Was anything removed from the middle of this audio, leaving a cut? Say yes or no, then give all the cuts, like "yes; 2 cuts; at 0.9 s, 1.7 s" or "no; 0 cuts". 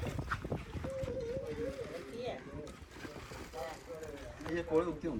no; 0 cuts